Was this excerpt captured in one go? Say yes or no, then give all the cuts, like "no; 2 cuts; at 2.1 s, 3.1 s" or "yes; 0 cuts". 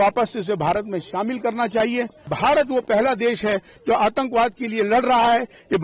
no; 1 cut; at 2.2 s